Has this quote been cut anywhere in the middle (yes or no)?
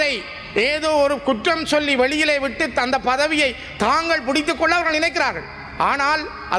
no